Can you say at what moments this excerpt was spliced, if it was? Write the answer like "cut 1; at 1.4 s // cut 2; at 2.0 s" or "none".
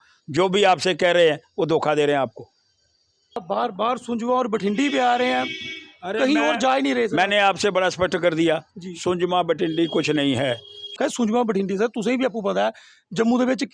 cut 1; at 3.4 s // cut 2; at 11.0 s